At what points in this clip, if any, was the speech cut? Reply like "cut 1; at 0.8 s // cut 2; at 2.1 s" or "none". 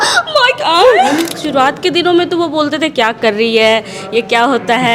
cut 1; at 1.4 s